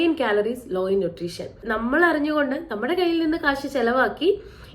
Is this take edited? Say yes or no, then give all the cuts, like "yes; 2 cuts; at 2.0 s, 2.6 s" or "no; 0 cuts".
yes; 1 cut; at 1.6 s